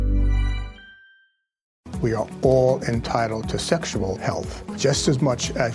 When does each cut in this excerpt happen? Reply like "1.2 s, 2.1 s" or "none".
1.8 s